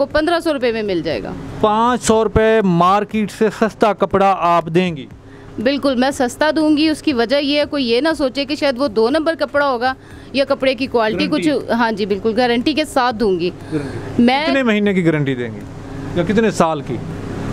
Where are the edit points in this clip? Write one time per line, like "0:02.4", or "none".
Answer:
none